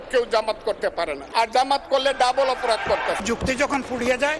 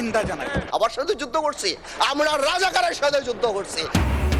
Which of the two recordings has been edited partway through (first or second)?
first